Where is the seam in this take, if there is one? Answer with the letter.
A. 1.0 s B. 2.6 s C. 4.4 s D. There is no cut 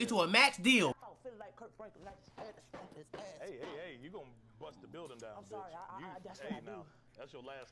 A